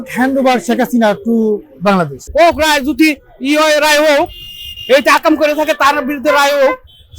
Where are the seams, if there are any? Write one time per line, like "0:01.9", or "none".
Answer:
0:02.2